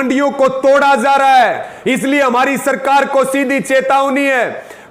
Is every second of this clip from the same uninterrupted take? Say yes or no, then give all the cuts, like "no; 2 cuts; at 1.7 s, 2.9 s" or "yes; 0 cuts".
no; 1 cut; at 1.7 s